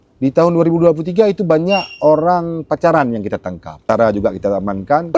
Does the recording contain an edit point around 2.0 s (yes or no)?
no